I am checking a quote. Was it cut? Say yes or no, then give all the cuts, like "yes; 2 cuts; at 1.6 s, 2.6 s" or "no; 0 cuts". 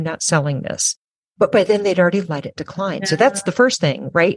yes; 1 cut; at 1.1 s